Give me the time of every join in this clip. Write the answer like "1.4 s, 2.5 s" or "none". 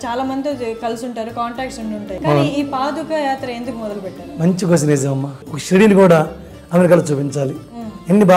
2.2 s, 5.4 s